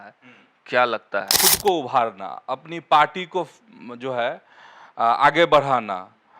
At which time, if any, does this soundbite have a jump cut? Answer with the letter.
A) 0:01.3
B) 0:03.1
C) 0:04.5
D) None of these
A